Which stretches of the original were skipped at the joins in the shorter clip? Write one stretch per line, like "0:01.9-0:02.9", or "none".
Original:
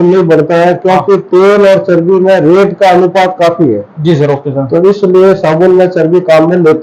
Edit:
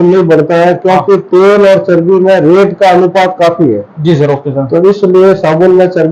none